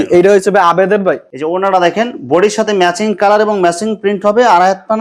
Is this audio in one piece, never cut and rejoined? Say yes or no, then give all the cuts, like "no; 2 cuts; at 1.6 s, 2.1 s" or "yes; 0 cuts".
yes; 0 cuts